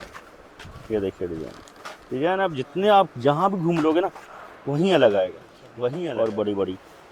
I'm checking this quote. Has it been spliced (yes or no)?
yes